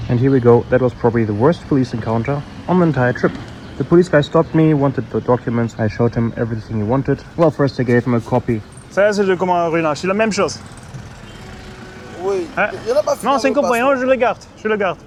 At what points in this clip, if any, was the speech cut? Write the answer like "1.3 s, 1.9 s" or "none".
none